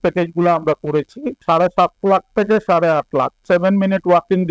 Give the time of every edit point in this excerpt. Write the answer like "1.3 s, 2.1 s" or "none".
1.3 s, 3.4 s